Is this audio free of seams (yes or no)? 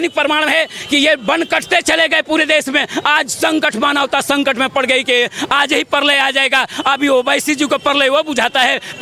yes